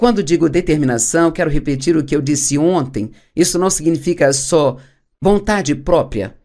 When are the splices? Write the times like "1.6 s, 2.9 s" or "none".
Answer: 4.4 s